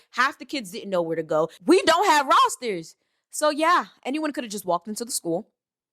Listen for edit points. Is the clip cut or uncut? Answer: cut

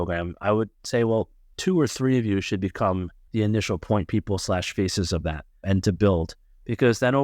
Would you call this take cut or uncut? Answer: cut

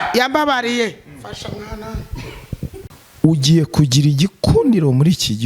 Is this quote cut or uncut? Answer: cut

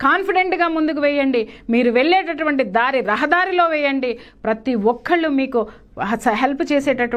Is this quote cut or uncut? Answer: uncut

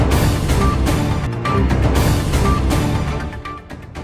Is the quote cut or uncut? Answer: uncut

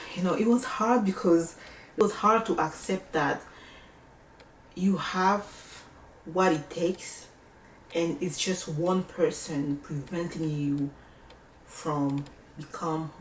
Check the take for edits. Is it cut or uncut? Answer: uncut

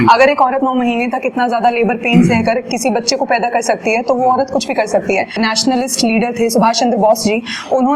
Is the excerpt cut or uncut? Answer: cut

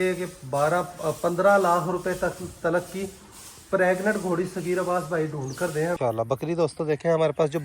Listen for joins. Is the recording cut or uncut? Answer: cut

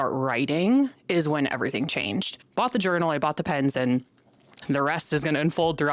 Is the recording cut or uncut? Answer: cut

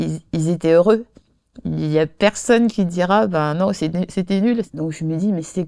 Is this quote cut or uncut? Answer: cut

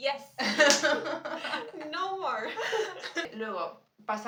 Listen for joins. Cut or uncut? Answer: uncut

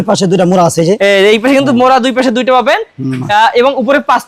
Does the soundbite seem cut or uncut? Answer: uncut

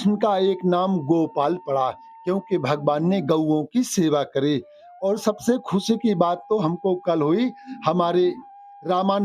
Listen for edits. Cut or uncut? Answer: uncut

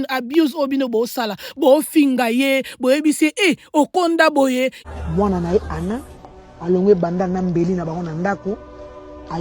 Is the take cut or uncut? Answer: cut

